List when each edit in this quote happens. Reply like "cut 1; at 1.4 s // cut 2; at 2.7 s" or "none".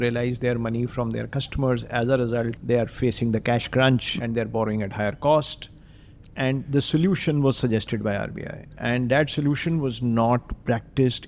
cut 1; at 2.6 s // cut 2; at 8.7 s